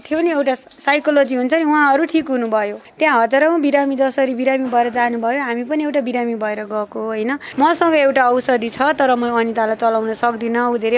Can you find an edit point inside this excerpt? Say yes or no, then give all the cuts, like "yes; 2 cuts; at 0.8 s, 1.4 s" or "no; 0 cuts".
yes; 2 cuts; at 2.8 s, 7.4 s